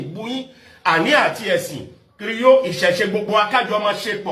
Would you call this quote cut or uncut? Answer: uncut